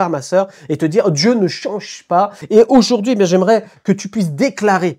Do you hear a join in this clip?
yes; 1 cut; at 2.4 s

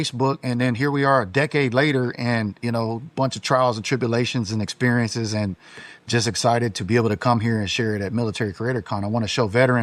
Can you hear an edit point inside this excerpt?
no; 0 cuts

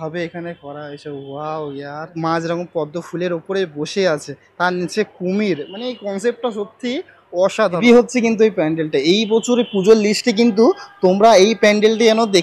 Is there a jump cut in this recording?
yes; 2 cuts; at 2.2 s, 7.8 s

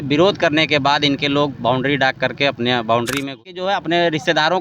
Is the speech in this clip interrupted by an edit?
yes; 1 cut; at 3.4 s

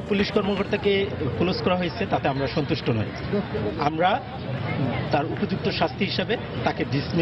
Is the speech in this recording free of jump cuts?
yes; 0 cuts

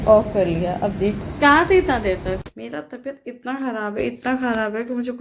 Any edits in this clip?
yes; 2 cuts; at 1.2 s, 2.5 s

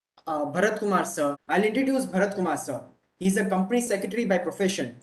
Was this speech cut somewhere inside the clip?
yes; 1 cut; at 1.4 s

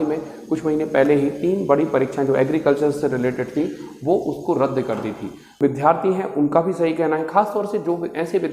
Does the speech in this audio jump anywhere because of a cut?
yes; 1 cut; at 5.5 s

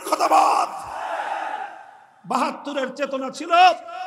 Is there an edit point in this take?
no; 0 cuts

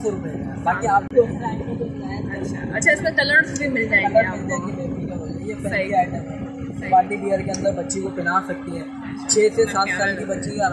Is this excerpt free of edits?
yes; 0 cuts

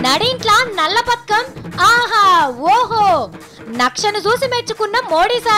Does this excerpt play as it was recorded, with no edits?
yes; 0 cuts

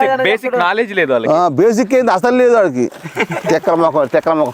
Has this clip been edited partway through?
no; 0 cuts

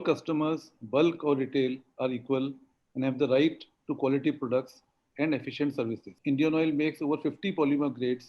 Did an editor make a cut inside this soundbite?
yes; 1 cut; at 6.1 s

